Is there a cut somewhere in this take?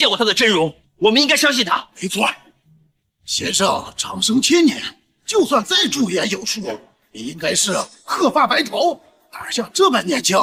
no; 0 cuts

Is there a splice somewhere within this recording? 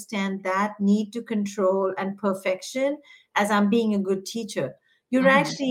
no; 0 cuts

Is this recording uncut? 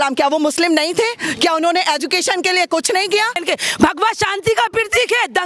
no; 1 cut; at 3.4 s

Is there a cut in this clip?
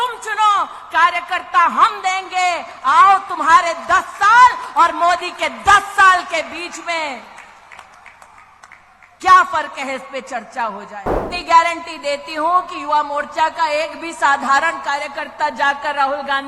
yes; 1 cut; at 11.2 s

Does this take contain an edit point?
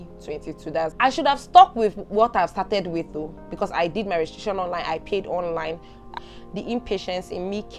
yes; 2 cuts; at 0.9 s, 6.1 s

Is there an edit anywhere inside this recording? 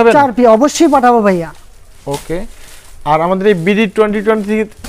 no; 0 cuts

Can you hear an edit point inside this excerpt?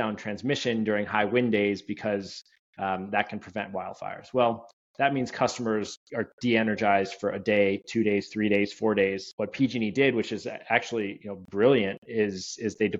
yes; 1 cut; at 9.3 s

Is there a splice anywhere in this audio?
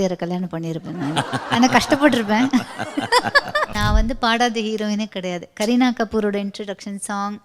yes; 1 cut; at 3.7 s

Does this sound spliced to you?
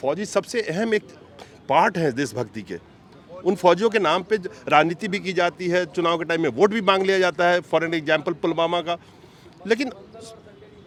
no; 0 cuts

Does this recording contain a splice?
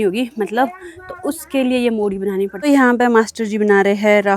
yes; 1 cut; at 2.5 s

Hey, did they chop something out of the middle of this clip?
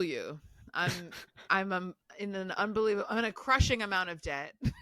no; 0 cuts

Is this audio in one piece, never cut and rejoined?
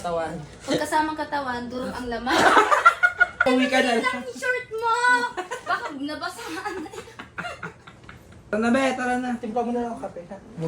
no; 2 cuts; at 3.4 s, 8.5 s

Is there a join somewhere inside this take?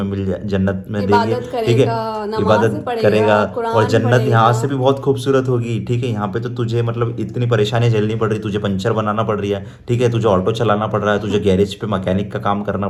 no; 0 cuts

